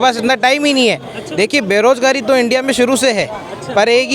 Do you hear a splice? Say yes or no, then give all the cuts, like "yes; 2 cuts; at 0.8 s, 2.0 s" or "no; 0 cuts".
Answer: yes; 1 cut; at 1.2 s